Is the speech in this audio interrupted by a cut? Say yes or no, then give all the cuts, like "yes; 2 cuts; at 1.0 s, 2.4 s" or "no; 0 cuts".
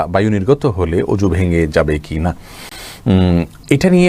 no; 0 cuts